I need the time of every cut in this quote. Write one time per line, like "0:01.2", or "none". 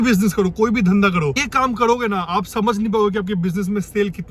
0:01.5